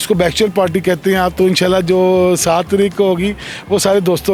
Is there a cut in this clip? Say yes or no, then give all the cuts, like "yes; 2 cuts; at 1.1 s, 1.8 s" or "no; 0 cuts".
no; 0 cuts